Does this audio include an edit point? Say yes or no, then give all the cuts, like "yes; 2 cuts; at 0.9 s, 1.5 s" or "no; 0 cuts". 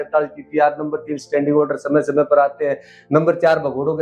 no; 0 cuts